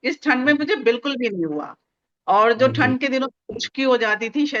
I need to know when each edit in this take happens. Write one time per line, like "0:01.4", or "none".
none